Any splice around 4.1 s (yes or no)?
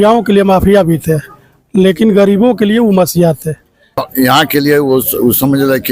yes